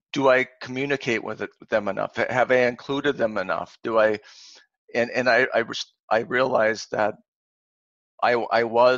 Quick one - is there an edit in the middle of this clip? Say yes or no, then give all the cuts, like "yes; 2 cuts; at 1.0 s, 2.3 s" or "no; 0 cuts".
no; 0 cuts